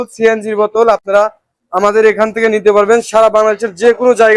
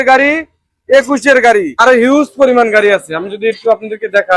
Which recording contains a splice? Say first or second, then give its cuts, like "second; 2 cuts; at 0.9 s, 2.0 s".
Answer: second; 1 cut; at 1.7 s